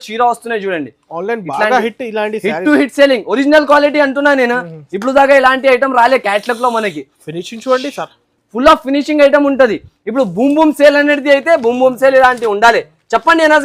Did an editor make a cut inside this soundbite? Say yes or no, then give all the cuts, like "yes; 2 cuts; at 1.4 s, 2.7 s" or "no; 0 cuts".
no; 0 cuts